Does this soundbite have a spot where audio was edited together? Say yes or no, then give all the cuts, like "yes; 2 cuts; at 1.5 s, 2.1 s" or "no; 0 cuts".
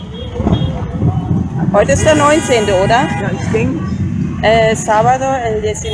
yes; 1 cut; at 1.2 s